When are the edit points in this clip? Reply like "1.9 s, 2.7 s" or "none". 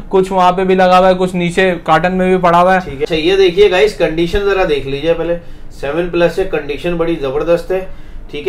3.0 s

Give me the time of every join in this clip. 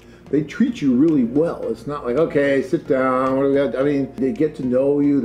4.2 s

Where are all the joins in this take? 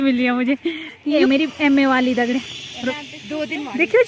1.2 s, 2.9 s

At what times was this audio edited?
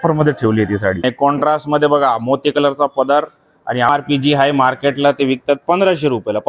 1.0 s, 3.9 s

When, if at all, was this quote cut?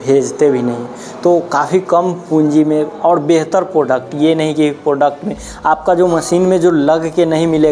none

